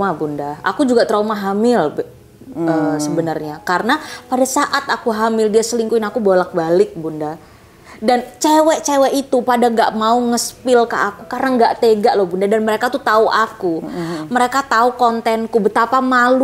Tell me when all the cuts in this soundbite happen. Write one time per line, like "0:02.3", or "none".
none

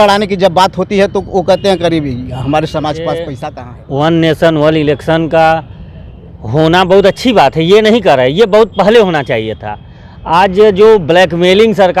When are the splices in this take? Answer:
0:03.3

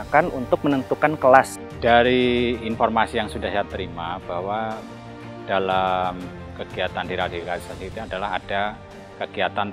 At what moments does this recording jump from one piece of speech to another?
0:01.6

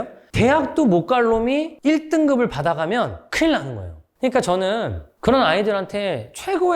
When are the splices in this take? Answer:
0:04.0

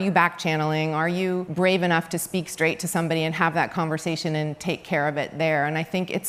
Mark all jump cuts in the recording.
0:01.5

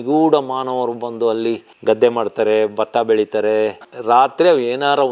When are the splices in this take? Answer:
0:03.9

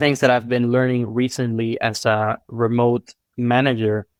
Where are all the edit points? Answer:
none

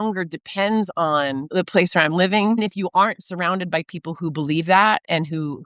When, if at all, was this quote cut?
0:01.5
0:02.6

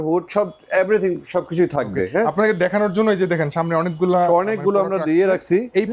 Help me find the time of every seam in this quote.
none

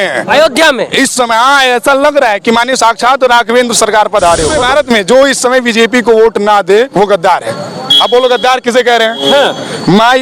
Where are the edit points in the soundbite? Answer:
0:04.6

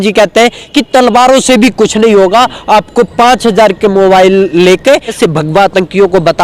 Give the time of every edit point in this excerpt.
0:05.2

